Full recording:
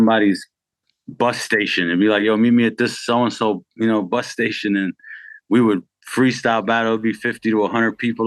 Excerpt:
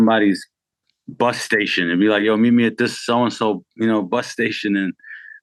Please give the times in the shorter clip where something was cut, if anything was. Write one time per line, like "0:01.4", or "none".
none